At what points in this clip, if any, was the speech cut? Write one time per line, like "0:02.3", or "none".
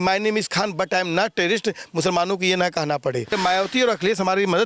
0:03.3